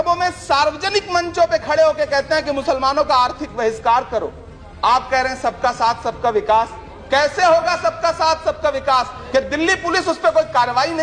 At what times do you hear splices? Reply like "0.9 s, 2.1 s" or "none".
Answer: 9.2 s